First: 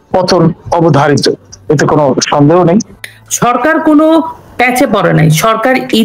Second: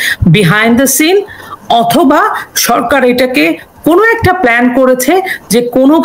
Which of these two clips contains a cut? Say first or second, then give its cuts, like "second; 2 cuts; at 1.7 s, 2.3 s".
first; 1 cut; at 3.1 s